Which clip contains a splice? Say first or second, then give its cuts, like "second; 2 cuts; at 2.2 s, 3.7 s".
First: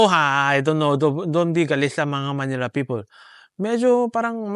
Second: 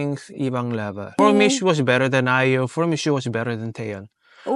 second; 1 cut; at 1.2 s